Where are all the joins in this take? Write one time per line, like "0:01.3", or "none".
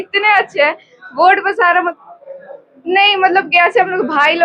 0:01.9